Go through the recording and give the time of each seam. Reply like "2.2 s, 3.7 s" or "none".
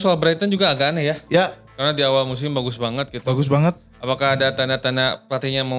none